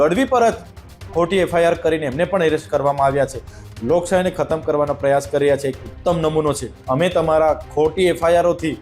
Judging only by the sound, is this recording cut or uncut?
cut